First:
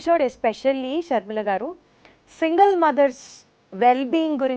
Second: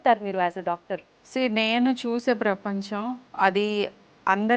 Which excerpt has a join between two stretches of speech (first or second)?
second